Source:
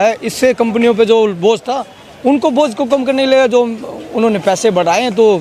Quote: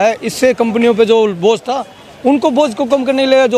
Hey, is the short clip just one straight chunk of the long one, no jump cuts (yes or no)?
yes